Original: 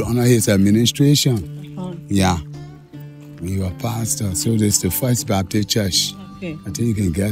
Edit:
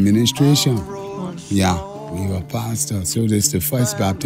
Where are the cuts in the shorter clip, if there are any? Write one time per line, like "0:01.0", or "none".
0:02.0